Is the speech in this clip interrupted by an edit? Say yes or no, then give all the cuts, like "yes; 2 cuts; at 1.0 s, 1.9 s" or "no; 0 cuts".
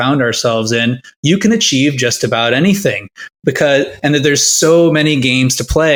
no; 0 cuts